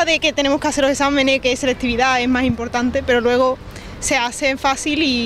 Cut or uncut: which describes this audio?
uncut